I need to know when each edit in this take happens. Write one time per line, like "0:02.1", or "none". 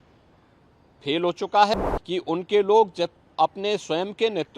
0:01.7